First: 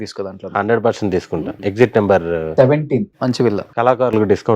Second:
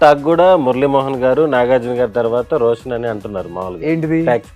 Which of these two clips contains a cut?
first; 2 cuts; at 1.5 s, 3.7 s

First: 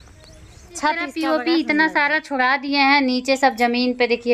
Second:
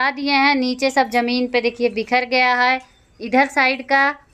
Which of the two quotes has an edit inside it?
first; 1 cut; at 1.1 s

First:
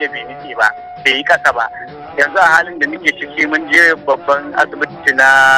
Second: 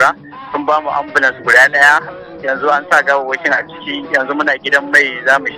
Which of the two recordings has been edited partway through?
first; 1 cut; at 2.0 s

